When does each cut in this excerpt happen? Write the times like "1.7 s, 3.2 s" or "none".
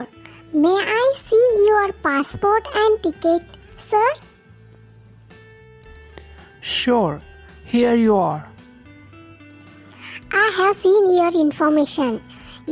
8.5 s, 10.3 s